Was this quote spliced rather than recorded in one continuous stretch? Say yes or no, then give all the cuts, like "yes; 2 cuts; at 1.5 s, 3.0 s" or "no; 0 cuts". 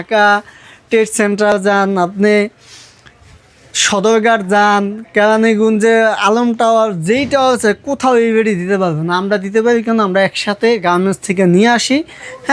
no; 0 cuts